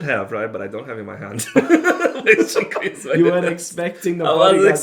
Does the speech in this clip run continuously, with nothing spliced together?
yes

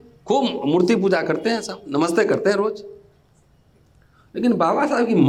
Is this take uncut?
yes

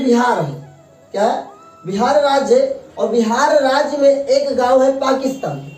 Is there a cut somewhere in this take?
no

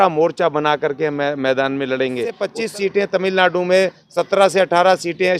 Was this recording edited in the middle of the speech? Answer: yes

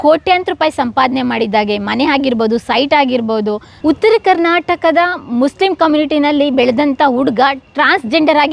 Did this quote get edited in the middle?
yes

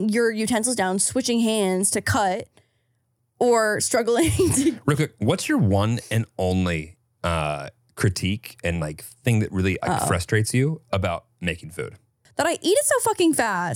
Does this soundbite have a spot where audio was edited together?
yes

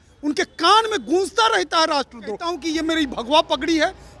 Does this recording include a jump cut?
yes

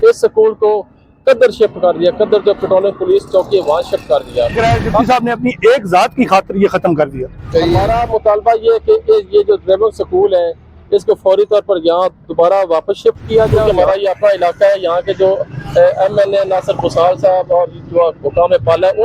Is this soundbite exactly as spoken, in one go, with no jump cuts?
no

